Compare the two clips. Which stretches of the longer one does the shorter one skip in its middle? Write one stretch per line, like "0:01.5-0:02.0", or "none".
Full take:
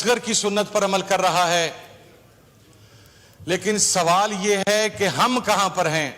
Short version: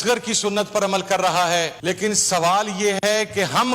0:01.8-0:03.4